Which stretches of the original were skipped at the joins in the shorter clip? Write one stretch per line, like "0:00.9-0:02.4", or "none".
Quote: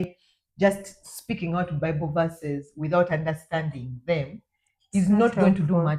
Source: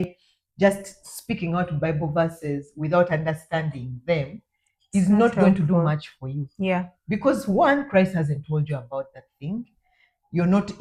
none